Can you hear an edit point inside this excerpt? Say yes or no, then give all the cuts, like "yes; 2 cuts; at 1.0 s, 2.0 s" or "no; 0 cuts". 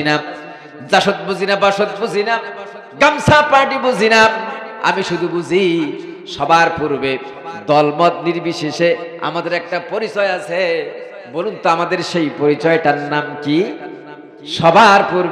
no; 0 cuts